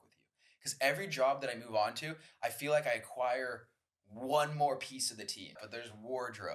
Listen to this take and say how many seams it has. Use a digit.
1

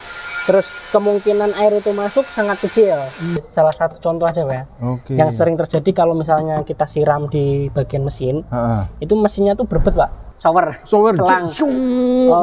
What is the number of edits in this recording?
2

